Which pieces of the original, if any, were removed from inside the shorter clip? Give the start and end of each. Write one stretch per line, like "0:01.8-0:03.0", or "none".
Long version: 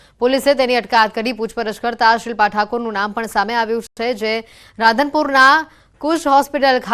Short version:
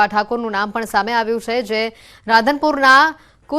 0:03.9-0:04.0